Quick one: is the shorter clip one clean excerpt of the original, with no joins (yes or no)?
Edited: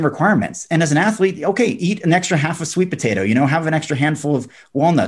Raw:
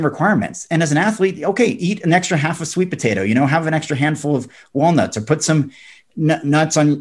yes